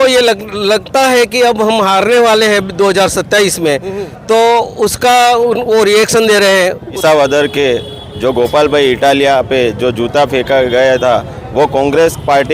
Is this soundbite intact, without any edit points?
no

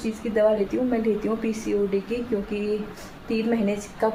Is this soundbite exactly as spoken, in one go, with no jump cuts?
yes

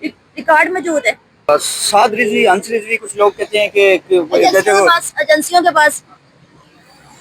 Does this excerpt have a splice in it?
yes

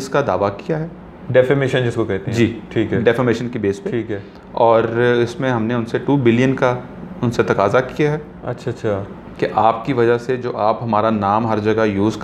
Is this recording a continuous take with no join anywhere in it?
yes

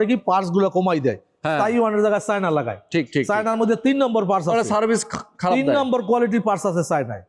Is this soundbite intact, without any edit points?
yes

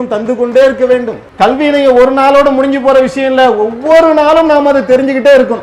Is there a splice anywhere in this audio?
yes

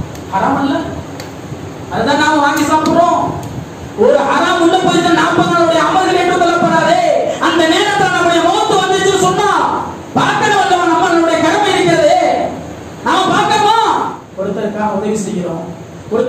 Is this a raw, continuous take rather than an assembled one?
no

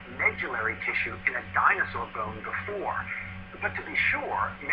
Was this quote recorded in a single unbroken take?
yes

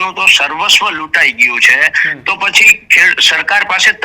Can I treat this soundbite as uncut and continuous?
yes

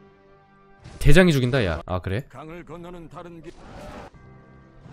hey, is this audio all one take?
no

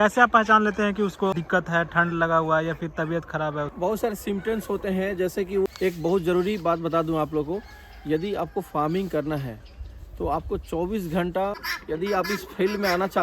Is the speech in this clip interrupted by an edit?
yes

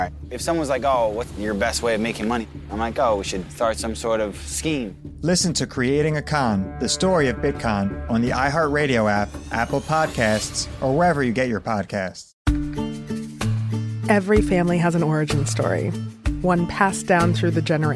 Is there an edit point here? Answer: yes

